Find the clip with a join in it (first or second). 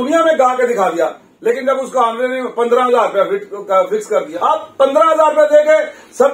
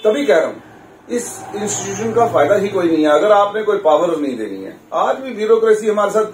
first